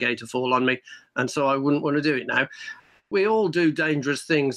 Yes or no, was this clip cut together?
yes